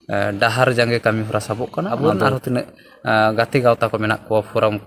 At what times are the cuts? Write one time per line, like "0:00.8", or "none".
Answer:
0:02.0